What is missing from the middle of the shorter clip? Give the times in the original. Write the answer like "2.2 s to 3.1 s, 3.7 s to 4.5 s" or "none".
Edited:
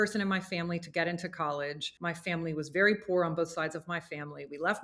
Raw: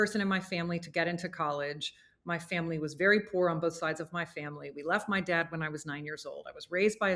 1.9 s to 2.1 s